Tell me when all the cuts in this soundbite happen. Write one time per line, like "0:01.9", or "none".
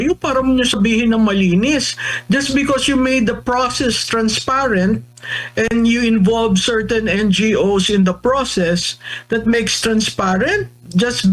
none